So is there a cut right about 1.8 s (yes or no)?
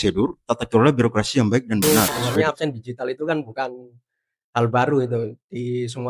yes